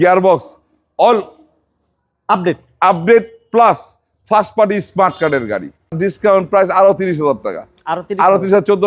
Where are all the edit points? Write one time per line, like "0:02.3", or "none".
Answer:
0:06.0